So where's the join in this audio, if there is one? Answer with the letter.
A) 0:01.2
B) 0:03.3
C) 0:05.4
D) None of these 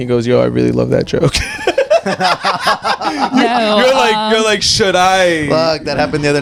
D